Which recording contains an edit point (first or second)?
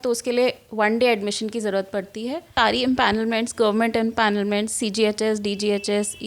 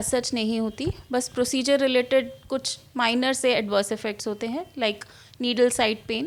first